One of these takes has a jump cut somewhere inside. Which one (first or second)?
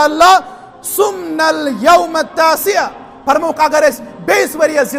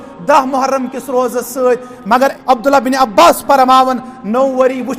second